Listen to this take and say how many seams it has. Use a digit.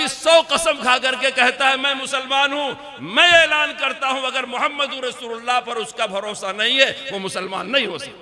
0